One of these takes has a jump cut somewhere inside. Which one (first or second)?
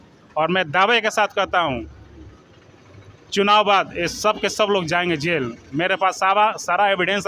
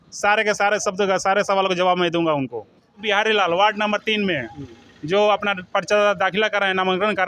second